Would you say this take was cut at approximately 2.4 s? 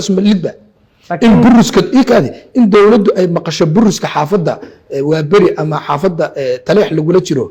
no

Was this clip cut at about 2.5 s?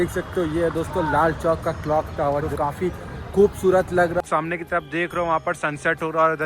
yes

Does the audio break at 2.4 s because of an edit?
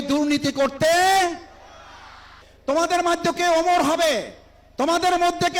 yes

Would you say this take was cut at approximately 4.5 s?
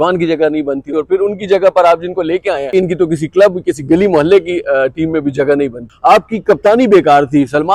no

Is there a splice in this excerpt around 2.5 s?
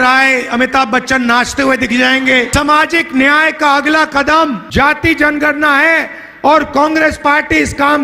yes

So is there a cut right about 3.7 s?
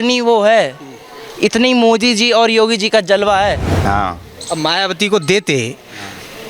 yes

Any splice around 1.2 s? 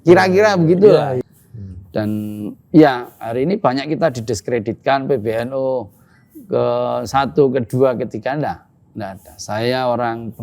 yes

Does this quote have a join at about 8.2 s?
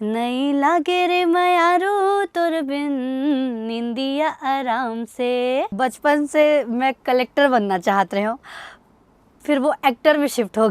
no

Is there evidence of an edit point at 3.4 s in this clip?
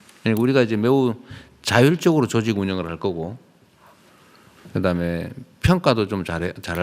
no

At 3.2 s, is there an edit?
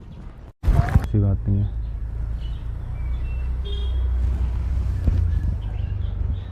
no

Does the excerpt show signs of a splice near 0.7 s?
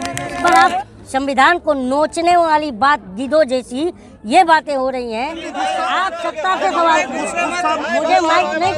yes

